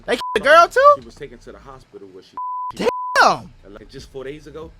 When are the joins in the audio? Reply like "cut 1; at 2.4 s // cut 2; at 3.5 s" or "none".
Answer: cut 1; at 2.7 s // cut 2; at 3.7 s